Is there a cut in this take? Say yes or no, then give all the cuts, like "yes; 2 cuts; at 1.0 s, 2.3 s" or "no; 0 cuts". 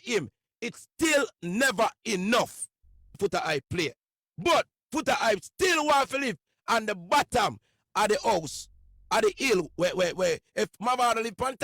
yes; 1 cut; at 3.2 s